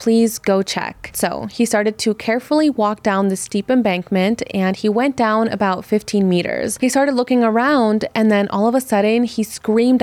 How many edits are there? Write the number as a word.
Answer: one